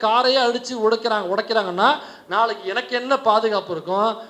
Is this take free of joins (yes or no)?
yes